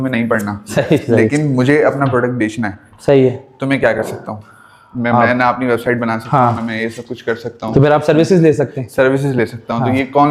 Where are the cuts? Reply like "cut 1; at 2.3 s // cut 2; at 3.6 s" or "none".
none